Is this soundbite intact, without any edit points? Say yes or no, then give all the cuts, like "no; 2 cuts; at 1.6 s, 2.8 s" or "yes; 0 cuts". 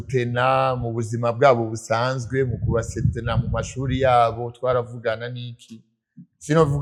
yes; 0 cuts